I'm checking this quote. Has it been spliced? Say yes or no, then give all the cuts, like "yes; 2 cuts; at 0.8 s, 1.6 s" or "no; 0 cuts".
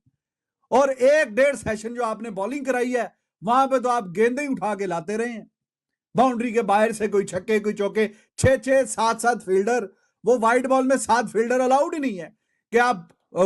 no; 0 cuts